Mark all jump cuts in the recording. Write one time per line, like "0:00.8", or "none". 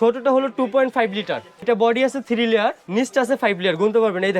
0:01.6
0:02.8